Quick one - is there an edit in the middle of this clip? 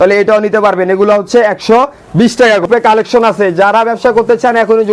yes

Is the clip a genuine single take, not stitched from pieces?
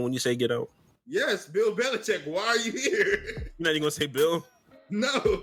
yes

